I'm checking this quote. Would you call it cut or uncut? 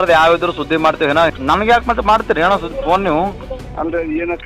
cut